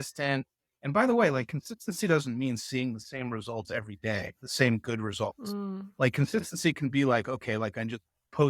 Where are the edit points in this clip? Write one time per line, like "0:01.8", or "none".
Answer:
none